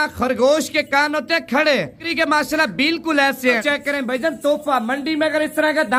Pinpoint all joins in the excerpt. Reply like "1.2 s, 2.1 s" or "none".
2.0 s, 3.6 s